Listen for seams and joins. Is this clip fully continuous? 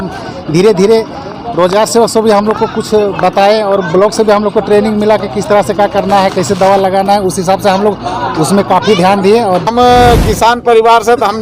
no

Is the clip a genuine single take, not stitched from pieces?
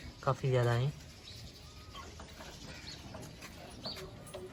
yes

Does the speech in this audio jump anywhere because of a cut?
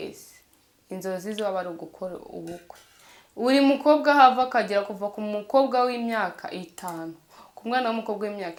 no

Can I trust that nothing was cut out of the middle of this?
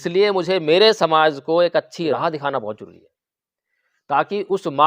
no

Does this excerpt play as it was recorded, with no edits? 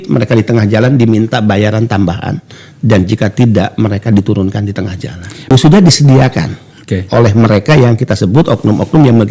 no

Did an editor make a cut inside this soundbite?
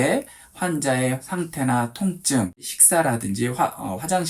yes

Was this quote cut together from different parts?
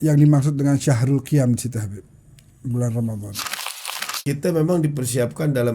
yes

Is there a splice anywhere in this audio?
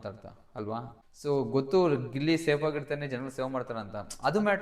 yes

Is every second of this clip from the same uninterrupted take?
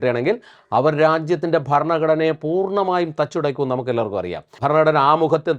no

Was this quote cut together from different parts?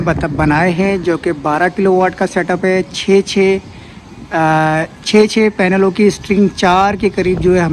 no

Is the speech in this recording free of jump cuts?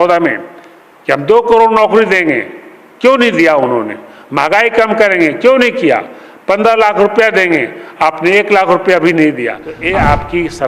no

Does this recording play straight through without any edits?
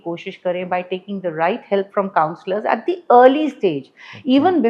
yes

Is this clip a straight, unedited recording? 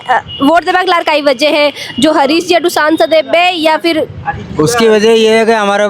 yes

